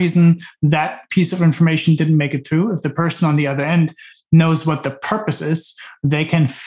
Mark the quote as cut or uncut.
uncut